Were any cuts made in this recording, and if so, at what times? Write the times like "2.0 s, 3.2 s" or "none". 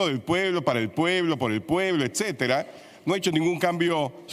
none